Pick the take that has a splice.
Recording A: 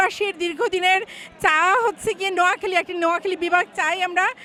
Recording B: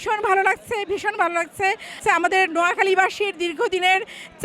B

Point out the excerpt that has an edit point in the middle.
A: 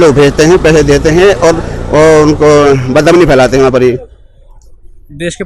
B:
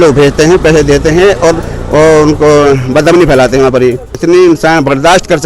B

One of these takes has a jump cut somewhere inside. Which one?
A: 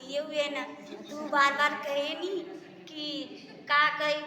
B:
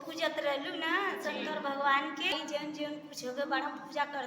B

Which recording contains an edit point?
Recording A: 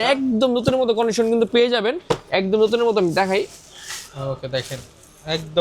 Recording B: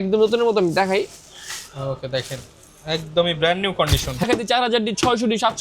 B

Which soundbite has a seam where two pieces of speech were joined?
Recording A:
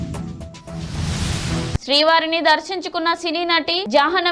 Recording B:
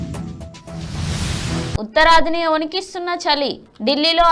A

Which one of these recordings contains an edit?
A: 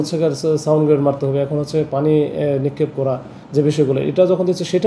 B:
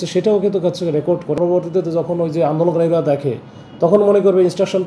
B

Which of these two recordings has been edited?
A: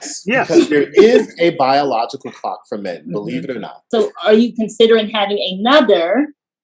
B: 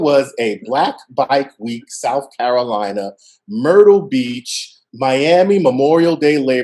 A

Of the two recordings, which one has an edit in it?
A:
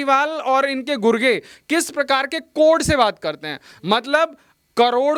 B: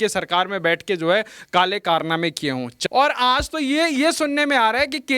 B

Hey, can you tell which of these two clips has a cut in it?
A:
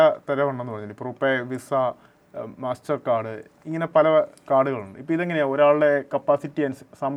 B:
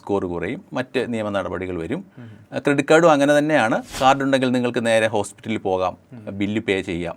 B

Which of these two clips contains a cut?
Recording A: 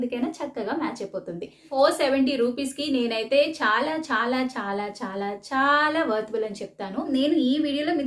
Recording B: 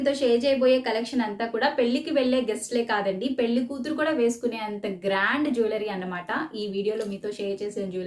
A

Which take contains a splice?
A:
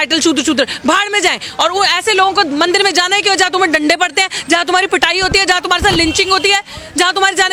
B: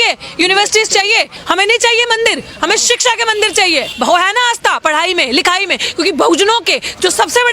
B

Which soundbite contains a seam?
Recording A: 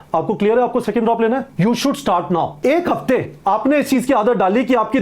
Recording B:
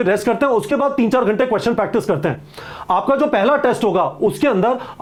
A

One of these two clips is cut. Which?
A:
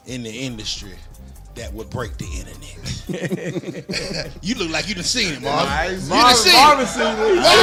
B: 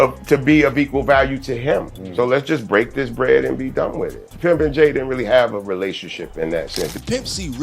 B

